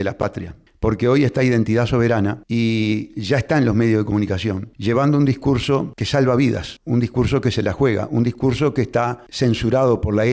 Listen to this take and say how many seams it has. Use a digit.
5